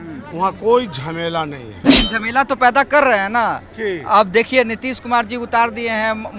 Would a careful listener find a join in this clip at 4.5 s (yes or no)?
no